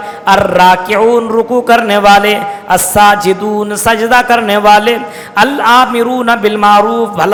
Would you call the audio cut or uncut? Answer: uncut